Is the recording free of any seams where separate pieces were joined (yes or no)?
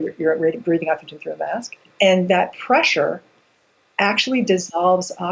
no